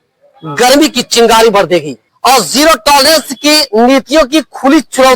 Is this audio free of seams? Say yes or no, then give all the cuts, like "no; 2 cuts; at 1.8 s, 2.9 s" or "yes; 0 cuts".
no; 1 cut; at 2.0 s